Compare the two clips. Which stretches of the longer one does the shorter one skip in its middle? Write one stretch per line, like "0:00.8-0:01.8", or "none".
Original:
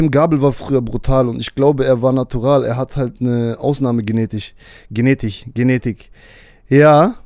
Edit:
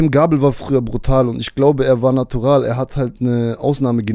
none